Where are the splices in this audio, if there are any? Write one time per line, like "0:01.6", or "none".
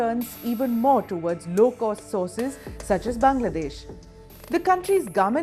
0:02.6